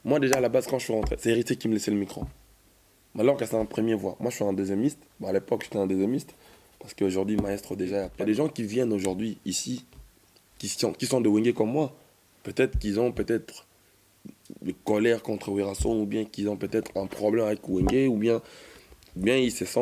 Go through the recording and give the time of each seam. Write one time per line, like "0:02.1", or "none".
0:08.1